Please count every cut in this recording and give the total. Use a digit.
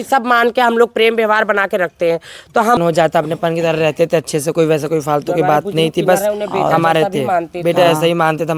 1